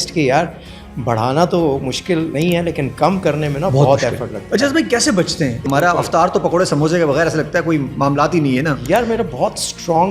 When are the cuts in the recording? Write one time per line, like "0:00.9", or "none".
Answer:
0:02.3
0:04.4
0:05.6